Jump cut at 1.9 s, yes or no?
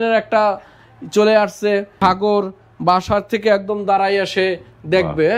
yes